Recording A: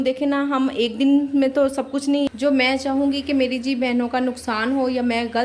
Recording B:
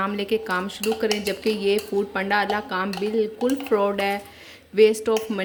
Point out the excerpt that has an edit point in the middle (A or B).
A